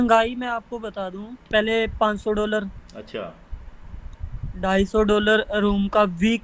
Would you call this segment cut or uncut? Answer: cut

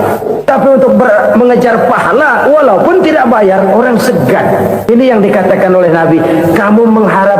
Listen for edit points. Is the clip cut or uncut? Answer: cut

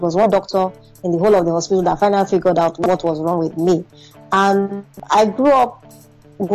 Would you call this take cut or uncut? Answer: cut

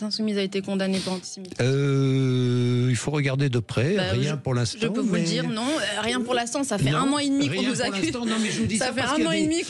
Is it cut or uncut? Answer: uncut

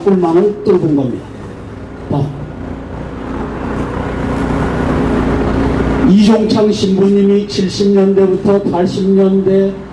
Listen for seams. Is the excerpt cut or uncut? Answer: cut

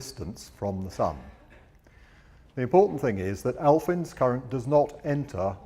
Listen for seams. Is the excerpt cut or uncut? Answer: cut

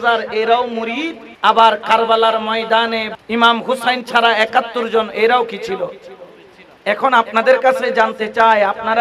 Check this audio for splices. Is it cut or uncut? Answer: cut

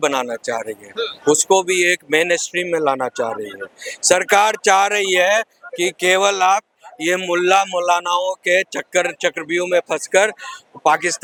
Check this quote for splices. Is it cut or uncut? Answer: uncut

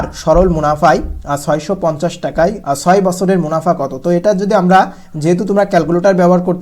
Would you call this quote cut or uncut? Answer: cut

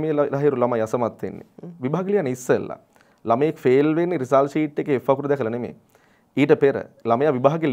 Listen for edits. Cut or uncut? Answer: uncut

